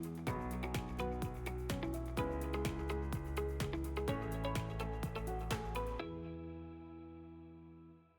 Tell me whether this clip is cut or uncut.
uncut